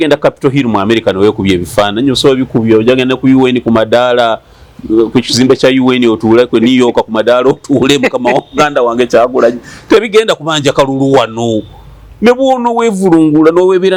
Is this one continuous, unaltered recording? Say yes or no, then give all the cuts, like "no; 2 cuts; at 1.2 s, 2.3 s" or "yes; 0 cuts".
yes; 0 cuts